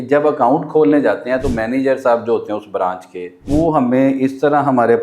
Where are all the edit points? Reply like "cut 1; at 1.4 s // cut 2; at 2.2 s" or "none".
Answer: cut 1; at 3.4 s